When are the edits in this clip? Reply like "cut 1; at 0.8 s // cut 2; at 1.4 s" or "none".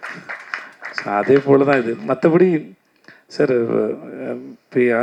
none